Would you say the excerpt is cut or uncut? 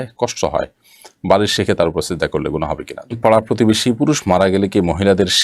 cut